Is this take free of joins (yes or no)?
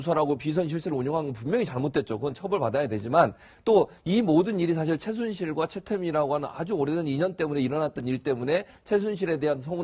yes